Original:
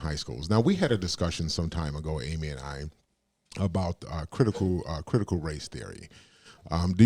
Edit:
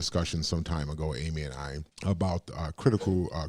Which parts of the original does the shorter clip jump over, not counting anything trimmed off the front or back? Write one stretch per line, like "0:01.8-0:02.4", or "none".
0:02.9-0:03.4

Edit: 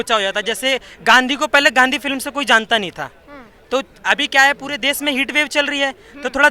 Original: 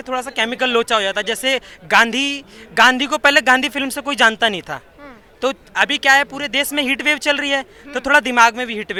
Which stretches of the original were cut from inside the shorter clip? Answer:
0:01.7-0:02.6

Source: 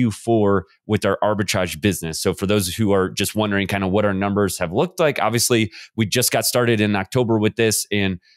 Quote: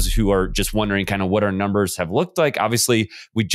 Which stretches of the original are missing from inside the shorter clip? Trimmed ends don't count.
none

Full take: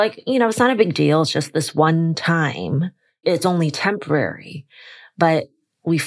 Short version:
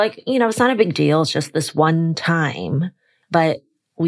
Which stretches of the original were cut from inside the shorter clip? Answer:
0:03.0-0:04.9

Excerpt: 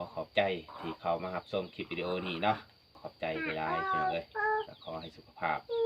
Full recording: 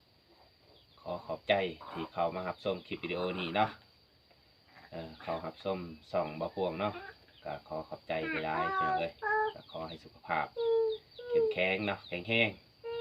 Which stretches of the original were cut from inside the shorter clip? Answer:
0:04.2-0:07.9

